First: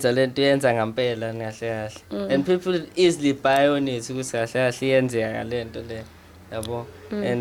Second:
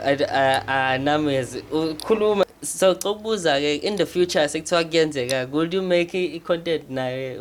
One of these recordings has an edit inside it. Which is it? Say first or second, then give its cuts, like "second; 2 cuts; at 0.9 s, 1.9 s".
second; 1 cut; at 2.4 s